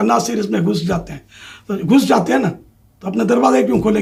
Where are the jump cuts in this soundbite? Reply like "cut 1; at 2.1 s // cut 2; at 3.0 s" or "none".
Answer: none